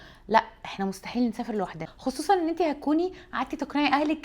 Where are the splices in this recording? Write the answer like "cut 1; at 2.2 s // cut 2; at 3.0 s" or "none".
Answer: cut 1; at 1.9 s